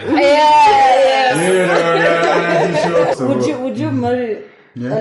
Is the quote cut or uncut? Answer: cut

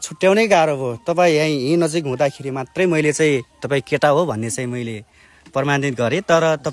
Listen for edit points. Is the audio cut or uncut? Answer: uncut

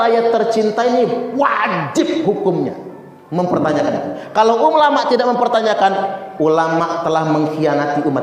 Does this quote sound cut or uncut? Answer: uncut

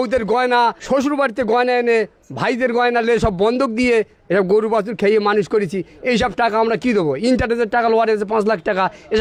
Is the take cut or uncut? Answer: uncut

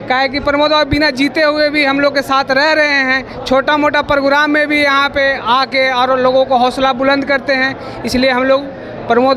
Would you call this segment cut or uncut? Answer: uncut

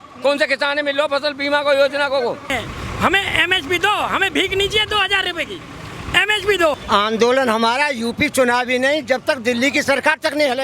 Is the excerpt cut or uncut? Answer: cut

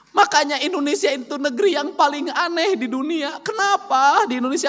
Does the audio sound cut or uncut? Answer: uncut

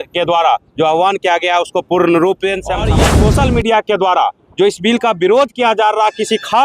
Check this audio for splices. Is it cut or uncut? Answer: cut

